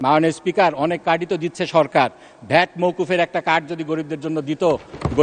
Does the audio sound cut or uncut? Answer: uncut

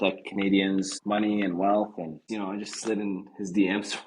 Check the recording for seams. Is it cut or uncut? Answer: cut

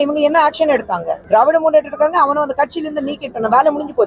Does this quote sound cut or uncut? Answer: cut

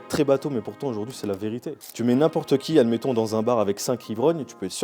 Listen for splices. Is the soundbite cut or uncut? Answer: cut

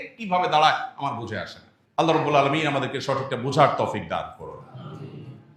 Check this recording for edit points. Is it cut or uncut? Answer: uncut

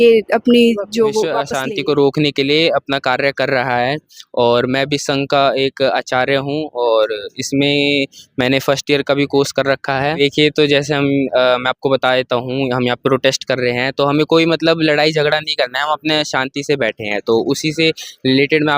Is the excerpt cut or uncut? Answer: cut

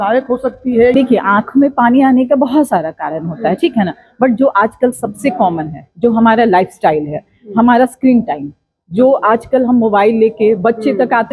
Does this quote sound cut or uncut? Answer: cut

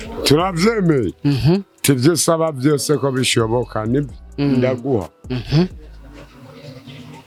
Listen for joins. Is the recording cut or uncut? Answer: uncut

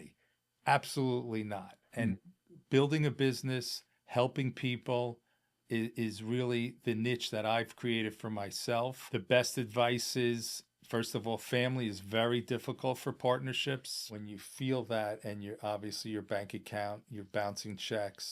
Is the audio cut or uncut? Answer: cut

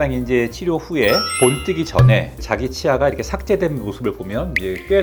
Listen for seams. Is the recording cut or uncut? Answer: uncut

